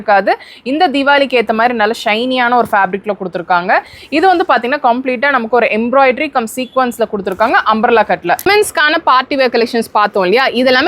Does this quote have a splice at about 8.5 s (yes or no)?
yes